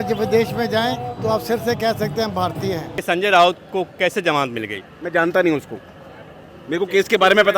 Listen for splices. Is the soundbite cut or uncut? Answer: cut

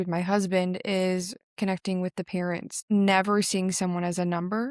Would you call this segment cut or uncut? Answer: uncut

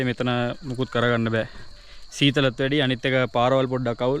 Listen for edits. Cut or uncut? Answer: uncut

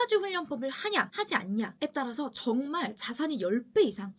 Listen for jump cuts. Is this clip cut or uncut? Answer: cut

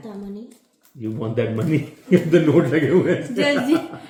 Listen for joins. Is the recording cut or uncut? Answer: uncut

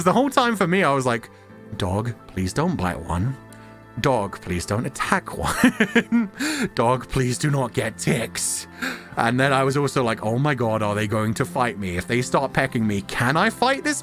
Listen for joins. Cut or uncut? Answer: uncut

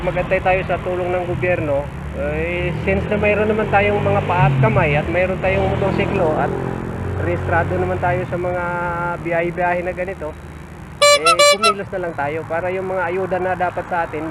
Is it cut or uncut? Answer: uncut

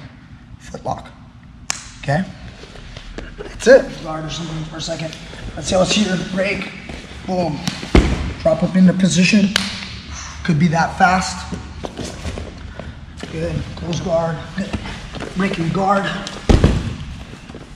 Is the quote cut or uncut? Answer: cut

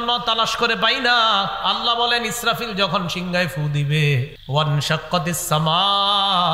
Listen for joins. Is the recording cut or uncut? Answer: cut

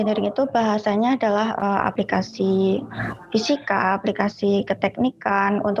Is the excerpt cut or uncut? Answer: cut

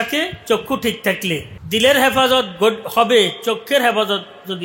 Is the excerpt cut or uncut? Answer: cut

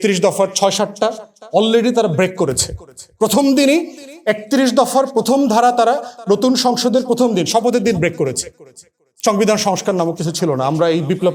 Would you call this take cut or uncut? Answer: uncut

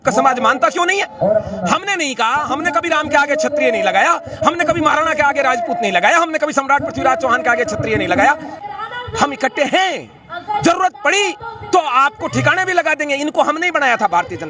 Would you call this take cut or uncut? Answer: cut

